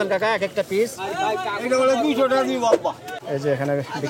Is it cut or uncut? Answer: cut